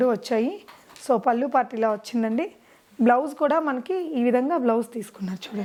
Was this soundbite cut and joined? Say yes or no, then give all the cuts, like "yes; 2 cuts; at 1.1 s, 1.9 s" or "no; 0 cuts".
no; 0 cuts